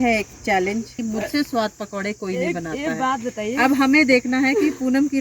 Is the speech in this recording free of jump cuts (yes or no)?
no